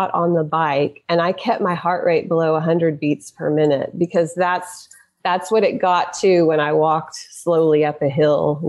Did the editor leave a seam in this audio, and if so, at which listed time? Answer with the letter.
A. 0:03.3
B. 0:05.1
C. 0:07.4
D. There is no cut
D